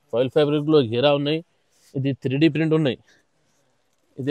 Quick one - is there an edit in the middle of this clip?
no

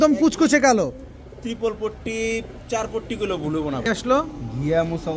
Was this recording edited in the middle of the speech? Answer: yes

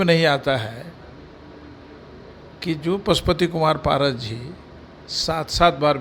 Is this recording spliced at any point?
no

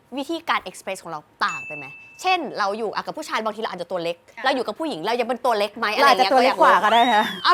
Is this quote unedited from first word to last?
yes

